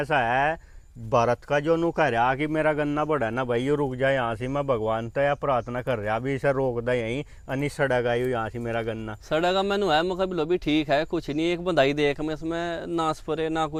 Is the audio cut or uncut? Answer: uncut